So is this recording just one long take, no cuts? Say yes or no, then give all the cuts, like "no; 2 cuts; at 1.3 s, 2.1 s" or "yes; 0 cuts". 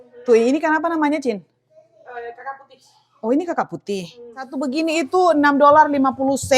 no; 1 cut; at 4.5 s